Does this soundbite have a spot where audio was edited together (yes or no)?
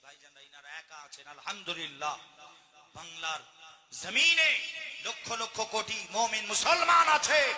yes